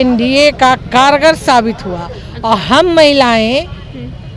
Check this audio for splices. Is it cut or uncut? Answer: uncut